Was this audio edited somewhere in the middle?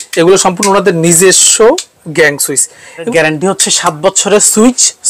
yes; 1 cut; at 3.0 s

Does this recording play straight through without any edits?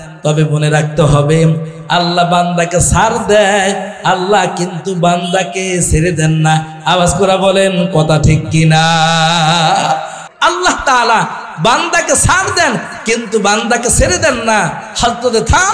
no; 1 cut; at 10.2 s

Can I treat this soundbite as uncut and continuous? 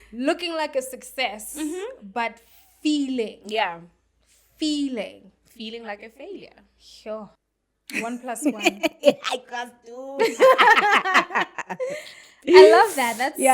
no; 1 cut; at 7.4 s

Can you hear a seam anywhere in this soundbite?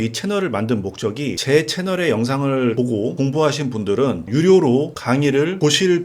yes; 3 cuts; at 1.4 s, 2.9 s, 5.0 s

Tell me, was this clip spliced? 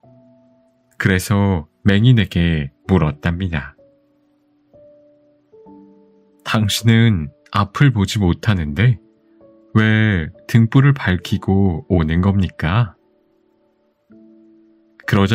no; 0 cuts

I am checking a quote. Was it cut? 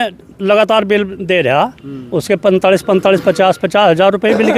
no; 0 cuts

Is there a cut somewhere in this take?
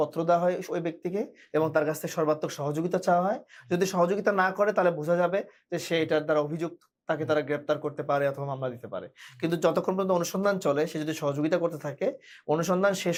no; 0 cuts

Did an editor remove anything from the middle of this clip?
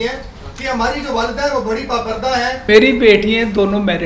yes; 1 cut; at 2.5 s

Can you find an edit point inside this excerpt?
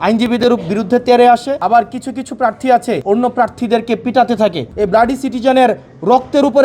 yes; 3 cuts; at 1.5 s, 3.0 s, 4.7 s

